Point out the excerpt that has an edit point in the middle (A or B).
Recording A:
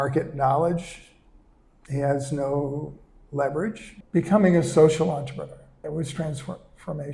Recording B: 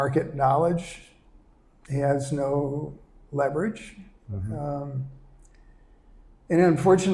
A